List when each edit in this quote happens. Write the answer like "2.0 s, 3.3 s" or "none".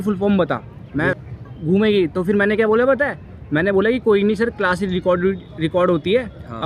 1.1 s